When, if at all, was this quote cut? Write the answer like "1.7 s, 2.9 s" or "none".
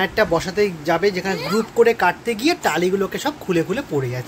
none